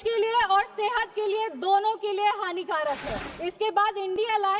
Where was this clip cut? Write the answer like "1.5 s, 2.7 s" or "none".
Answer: 3.2 s